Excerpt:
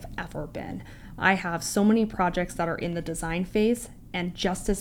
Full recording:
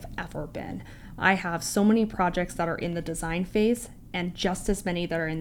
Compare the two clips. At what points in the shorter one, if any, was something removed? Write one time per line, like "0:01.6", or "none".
none